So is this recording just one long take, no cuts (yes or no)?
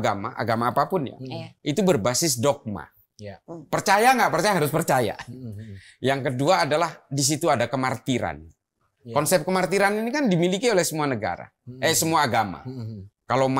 yes